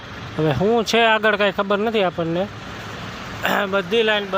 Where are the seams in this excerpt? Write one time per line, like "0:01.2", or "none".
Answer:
none